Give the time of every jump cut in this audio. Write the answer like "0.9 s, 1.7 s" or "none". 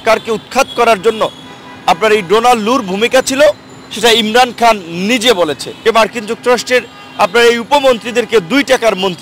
5.7 s